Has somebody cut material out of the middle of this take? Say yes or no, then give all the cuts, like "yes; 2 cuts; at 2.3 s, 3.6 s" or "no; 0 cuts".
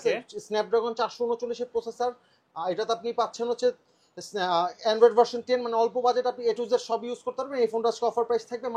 no; 0 cuts